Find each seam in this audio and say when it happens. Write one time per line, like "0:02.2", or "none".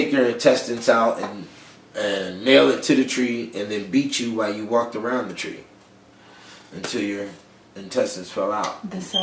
0:02.5